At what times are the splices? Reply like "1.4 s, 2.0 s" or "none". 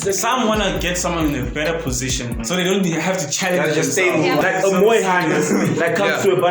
4.4 s